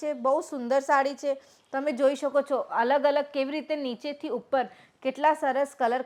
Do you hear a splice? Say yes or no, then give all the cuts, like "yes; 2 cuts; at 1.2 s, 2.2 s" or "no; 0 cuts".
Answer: no; 0 cuts